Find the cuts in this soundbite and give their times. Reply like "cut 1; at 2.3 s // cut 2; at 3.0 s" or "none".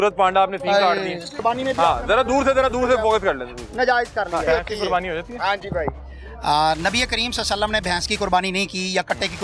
cut 1; at 1.3 s // cut 2; at 4.4 s